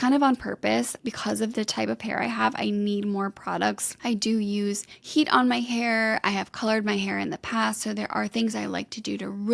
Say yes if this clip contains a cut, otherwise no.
yes